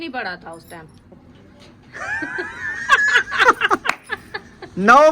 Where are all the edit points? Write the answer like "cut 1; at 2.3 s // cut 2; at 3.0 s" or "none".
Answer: cut 1; at 1.0 s